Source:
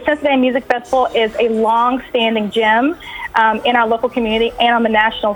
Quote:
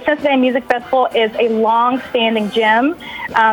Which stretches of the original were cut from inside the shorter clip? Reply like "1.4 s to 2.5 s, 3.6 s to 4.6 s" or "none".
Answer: none